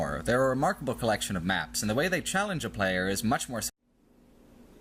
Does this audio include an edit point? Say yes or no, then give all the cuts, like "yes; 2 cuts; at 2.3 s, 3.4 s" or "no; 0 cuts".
no; 0 cuts